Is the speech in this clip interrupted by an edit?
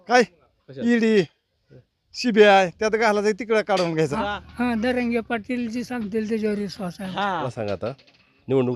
yes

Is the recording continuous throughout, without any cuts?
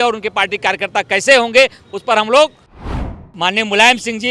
no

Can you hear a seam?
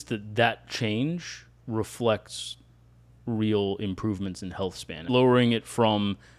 yes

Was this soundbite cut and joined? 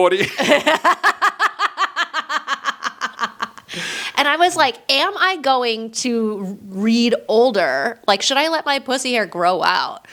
no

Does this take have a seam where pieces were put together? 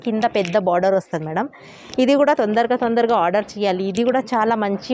no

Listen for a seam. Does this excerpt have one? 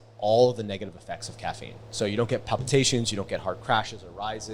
yes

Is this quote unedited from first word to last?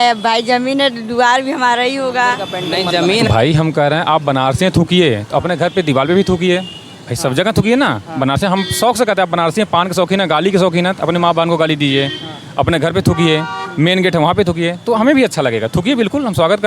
no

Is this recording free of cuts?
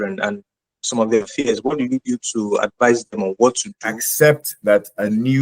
no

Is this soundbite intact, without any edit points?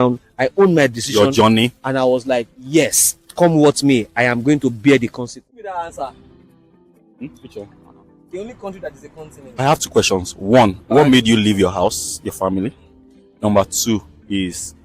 no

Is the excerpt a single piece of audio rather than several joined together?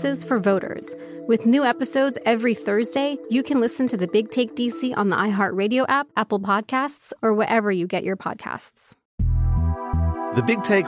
no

